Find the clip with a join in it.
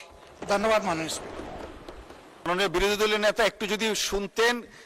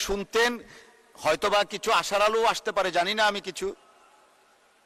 first; 1 cut; at 2.5 s

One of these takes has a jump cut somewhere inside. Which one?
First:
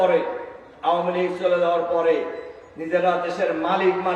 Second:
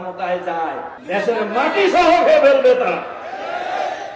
second; 1 cut; at 1.0 s

